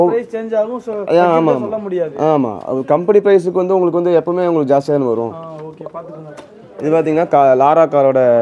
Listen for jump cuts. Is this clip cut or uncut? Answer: cut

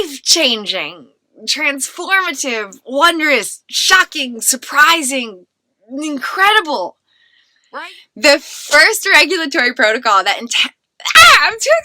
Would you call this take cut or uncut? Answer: cut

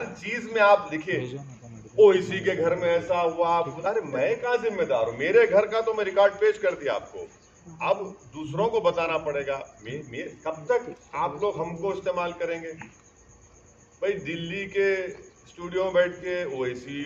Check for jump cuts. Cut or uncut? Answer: uncut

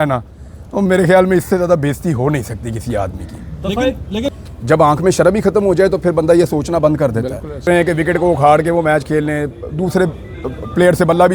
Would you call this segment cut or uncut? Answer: cut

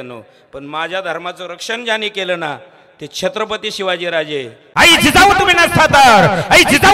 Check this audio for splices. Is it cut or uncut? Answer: cut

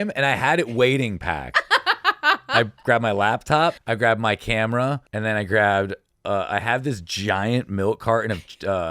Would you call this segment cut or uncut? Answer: cut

